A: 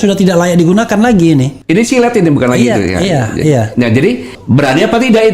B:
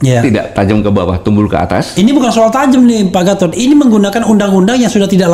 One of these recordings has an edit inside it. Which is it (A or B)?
A